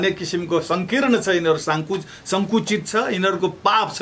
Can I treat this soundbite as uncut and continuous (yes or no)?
yes